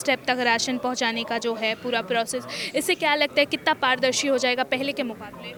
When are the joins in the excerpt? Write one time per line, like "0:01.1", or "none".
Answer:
none